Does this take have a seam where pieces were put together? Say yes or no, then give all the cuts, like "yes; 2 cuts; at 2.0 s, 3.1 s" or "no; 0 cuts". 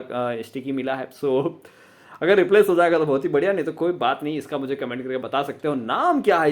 no; 0 cuts